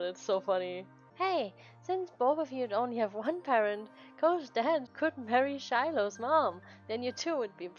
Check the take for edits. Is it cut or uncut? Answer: cut